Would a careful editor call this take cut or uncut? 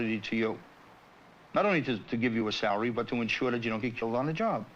cut